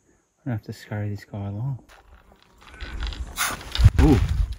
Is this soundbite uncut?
no; 1 cut; at 1.9 s

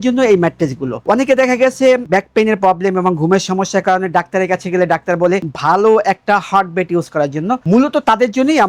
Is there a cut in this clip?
no; 0 cuts

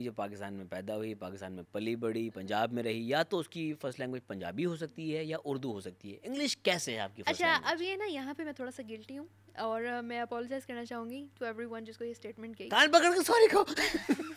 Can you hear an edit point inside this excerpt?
no; 0 cuts

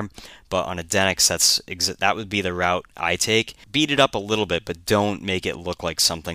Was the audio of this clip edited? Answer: yes; 1 cut; at 3.6 s

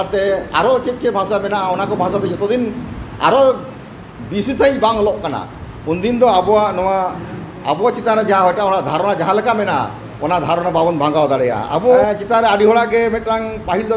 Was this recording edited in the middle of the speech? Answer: yes; 1 cut; at 12.0 s

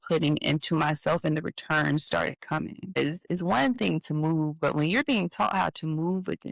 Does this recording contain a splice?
yes; 1 cut; at 3.0 s

